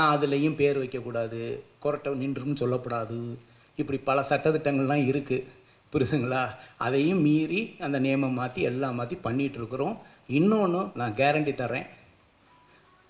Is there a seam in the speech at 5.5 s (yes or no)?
no